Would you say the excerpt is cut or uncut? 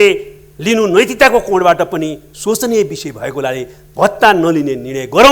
uncut